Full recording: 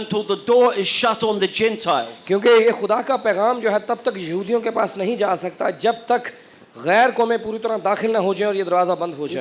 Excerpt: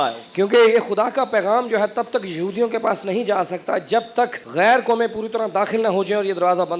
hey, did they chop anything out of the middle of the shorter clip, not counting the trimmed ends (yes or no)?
yes